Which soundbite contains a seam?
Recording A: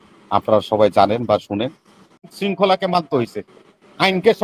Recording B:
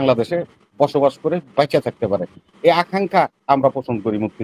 A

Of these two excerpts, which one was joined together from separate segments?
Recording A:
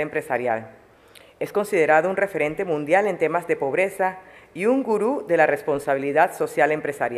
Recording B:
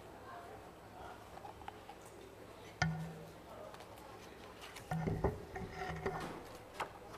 A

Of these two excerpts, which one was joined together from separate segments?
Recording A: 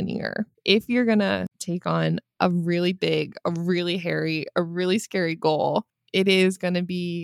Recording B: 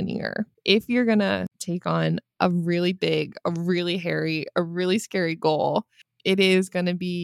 A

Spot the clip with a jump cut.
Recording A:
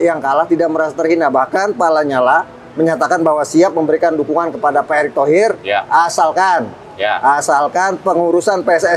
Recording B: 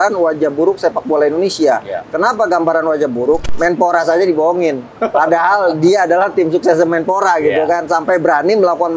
B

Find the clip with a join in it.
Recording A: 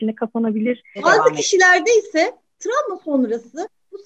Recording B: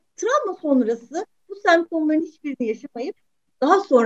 A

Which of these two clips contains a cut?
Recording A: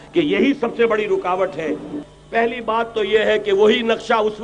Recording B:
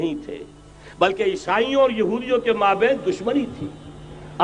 A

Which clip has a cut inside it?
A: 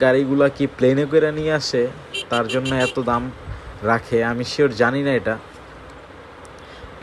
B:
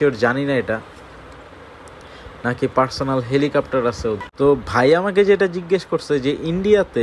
B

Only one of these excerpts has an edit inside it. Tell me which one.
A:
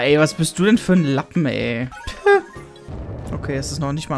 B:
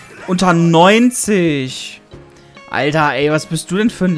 A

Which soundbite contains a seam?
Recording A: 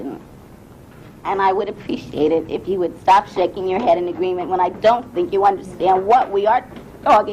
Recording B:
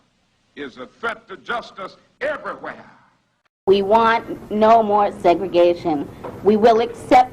B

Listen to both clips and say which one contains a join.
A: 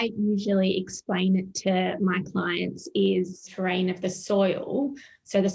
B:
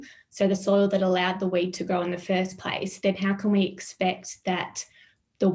A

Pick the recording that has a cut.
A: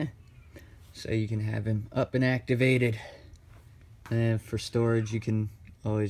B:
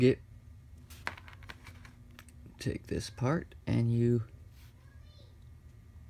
B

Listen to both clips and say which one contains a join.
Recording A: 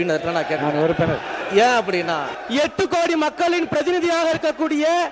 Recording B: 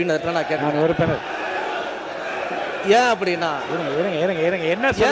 A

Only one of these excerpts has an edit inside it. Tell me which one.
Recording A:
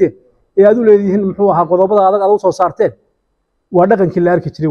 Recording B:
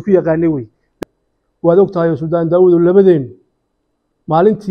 B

